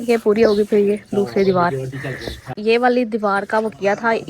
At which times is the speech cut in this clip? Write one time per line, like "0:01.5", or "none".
0:02.5